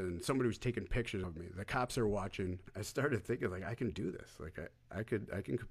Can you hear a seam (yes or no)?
yes